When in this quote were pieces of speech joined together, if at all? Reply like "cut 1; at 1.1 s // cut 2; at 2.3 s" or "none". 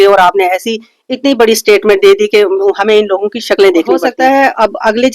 cut 1; at 4.1 s